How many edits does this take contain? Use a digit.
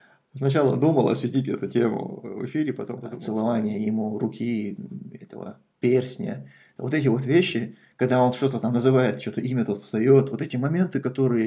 1